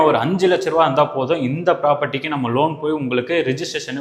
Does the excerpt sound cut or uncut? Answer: uncut